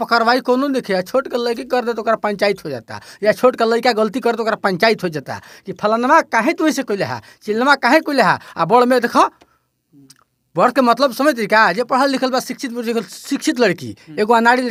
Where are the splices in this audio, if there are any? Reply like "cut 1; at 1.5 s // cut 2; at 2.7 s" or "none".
none